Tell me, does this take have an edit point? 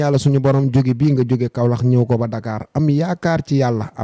no; 0 cuts

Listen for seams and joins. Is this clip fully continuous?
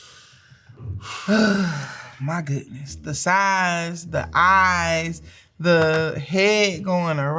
yes; 0 cuts

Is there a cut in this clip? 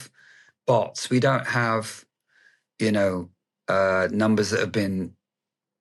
no; 0 cuts

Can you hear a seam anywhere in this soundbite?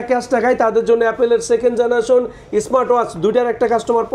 no; 0 cuts

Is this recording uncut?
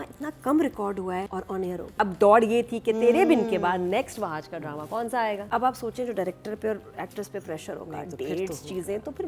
no; 2 cuts; at 1.9 s, 5.4 s

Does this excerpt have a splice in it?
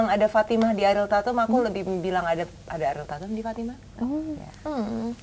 no; 0 cuts

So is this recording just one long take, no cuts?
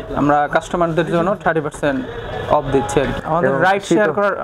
no; 1 cut; at 3.1 s

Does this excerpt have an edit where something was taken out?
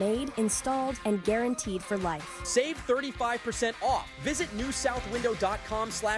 no; 0 cuts

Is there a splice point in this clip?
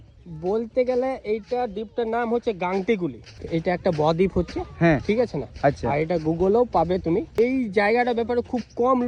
yes; 2 cuts; at 3.4 s, 7.3 s

